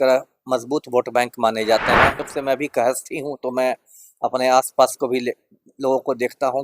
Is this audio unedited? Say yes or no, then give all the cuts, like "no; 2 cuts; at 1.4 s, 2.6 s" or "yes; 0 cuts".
no; 1 cut; at 2.3 s